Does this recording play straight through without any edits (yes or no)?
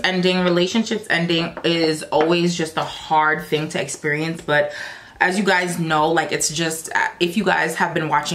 yes